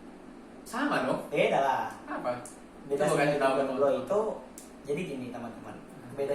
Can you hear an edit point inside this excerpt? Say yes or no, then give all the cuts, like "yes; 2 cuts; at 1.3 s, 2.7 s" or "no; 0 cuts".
yes; 1 cut; at 2.0 s